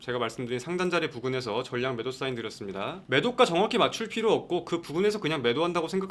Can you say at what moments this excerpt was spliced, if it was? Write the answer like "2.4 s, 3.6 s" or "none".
none

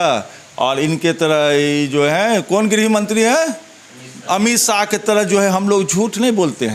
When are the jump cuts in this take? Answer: none

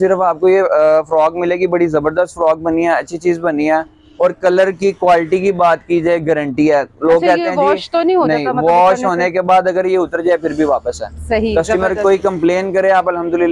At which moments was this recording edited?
none

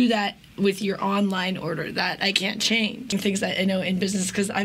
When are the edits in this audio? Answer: 3.1 s

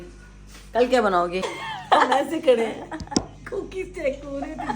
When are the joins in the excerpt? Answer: 1.6 s

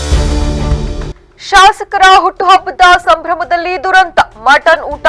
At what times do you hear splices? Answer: 1.2 s

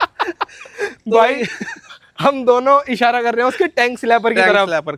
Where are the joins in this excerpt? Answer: none

